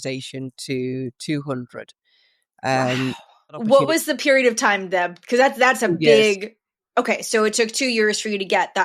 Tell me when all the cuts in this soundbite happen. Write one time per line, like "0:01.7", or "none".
0:03.5